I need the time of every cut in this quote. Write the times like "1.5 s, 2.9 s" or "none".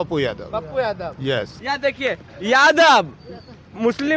1.5 s